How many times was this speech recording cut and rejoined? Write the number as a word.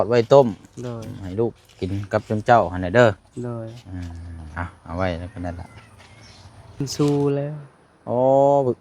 one